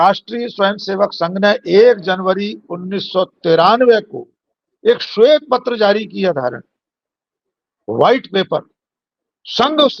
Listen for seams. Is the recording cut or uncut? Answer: uncut